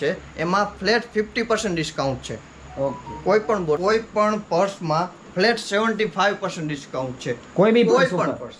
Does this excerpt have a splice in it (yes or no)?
yes